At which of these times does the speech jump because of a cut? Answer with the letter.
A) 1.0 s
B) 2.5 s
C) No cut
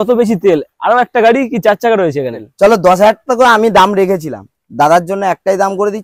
B